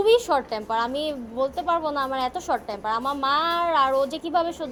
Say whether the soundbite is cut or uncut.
uncut